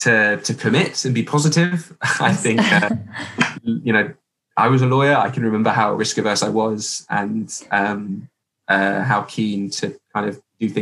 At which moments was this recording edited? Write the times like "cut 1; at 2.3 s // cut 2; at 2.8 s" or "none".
none